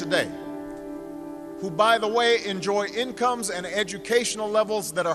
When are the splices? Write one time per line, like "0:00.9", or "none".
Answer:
0:02.9